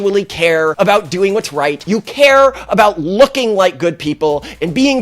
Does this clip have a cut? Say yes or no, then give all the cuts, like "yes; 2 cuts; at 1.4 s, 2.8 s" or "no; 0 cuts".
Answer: yes; 2 cuts; at 0.7 s, 1.8 s